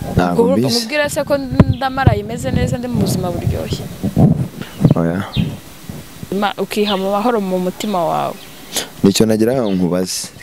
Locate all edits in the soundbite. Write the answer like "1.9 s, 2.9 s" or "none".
6.3 s